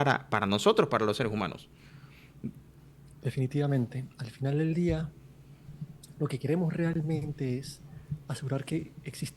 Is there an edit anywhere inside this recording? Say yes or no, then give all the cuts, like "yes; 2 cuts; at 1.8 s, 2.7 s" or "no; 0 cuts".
no; 0 cuts